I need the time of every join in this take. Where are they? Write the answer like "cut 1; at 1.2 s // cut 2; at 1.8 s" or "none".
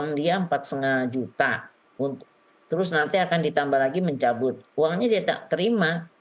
none